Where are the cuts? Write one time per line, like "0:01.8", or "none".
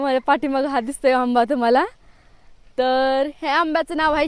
none